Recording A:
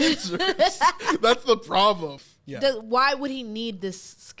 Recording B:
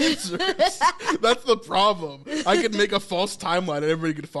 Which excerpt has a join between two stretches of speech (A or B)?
A